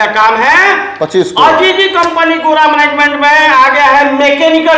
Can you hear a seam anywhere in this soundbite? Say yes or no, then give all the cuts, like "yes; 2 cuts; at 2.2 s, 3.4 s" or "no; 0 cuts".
no; 0 cuts